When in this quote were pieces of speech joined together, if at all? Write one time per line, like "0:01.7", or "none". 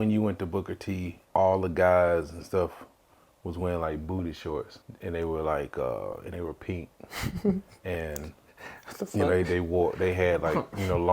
0:01.1
0:04.8